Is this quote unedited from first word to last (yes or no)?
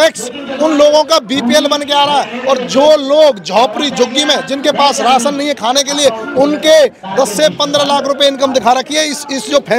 yes